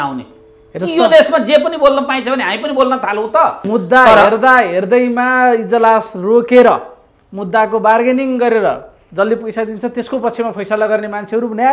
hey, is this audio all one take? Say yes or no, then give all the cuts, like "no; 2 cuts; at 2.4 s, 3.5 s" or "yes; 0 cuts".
no; 1 cut; at 3.6 s